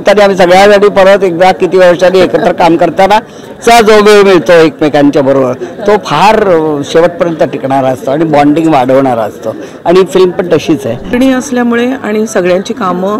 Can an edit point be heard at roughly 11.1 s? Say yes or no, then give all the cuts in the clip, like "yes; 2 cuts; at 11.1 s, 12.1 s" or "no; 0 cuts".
yes; 1 cut; at 11.1 s